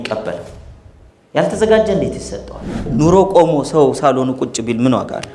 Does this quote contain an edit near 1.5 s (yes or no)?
no